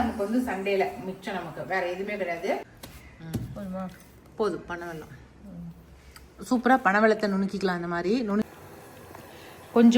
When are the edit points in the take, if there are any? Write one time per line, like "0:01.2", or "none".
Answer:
0:02.8
0:08.5

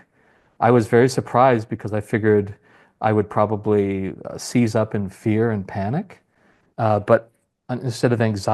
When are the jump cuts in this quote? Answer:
0:06.6

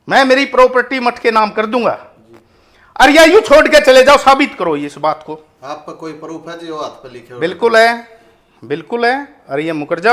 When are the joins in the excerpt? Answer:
none

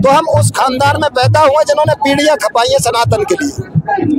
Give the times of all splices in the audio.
none

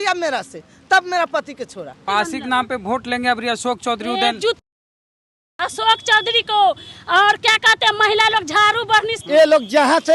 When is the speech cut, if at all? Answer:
0:02.0
0:09.2

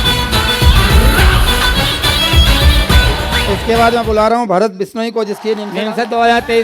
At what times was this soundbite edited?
0:03.5
0:05.7

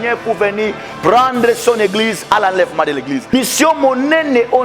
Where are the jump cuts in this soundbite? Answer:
0:03.3

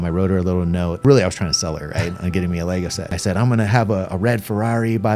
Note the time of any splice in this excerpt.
0:01.0
0:03.2

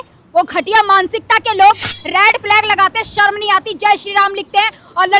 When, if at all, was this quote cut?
none

